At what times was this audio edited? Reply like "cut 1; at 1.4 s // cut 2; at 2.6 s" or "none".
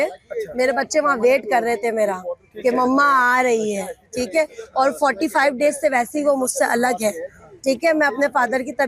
none

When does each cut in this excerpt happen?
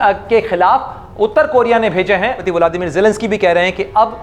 cut 1; at 2.4 s

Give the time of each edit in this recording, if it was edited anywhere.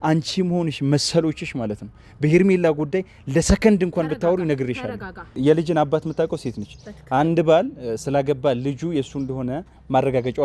cut 1; at 5.4 s

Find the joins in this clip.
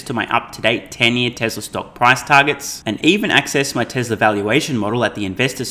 none

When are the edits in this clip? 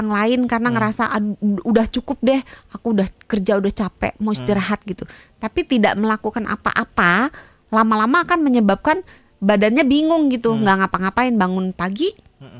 none

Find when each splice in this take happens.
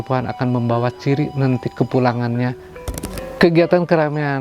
cut 1; at 3.1 s

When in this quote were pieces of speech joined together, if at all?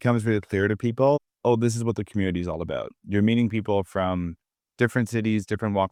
none

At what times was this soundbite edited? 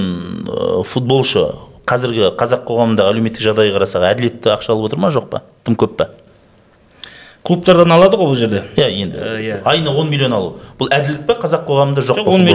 none

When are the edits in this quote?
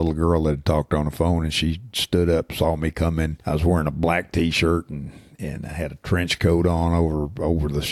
cut 1; at 3.4 s

